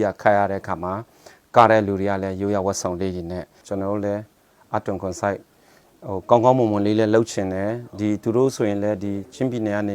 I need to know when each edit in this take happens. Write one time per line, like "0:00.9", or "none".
0:03.6